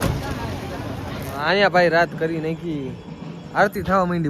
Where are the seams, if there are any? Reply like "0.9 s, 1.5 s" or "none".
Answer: 1.4 s